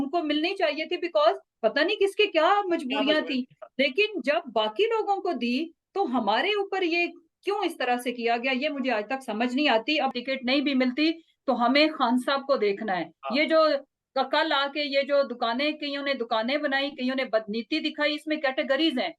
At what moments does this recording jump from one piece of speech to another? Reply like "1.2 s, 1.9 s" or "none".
10.1 s